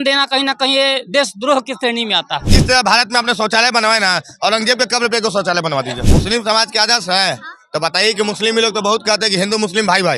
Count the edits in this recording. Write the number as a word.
two